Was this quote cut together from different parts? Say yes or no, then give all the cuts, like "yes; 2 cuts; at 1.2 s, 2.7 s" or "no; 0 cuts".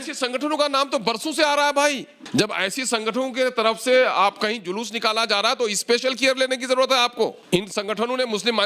yes; 2 cuts; at 2.1 s, 7.4 s